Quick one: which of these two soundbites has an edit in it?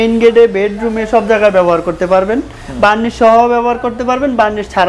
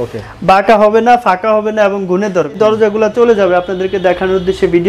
second; 1 cut; at 2.6 s

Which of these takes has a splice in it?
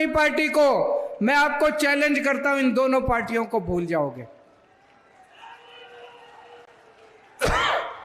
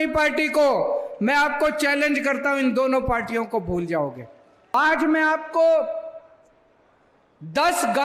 second; 1 cut; at 4.7 s

